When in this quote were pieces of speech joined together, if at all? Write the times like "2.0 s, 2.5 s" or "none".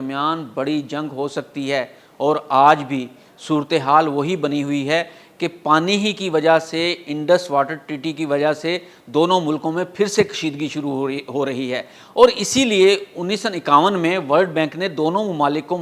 none